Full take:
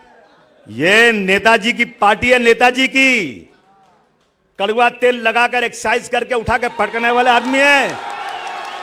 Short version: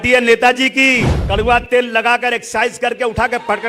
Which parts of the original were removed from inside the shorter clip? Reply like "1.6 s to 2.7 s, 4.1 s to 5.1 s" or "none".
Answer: 3.3 s to 4.4 s